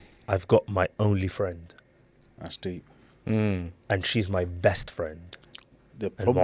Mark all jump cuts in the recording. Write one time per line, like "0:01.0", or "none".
none